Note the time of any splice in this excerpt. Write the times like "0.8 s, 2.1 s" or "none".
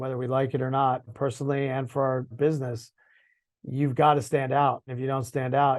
1.1 s, 2.3 s, 4.9 s